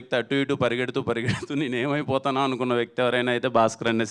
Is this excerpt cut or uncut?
uncut